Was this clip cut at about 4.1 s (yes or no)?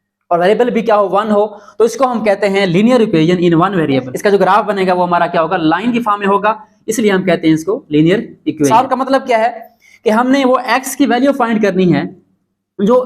yes